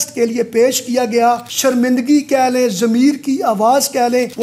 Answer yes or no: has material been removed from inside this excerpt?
yes